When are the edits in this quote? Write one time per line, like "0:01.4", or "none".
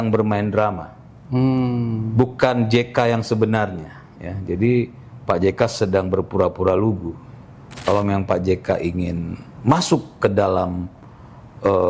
0:07.7